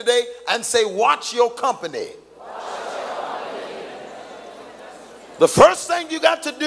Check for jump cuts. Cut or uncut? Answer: cut